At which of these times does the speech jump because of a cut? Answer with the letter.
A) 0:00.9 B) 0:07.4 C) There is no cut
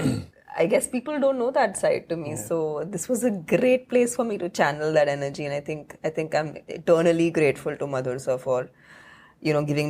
C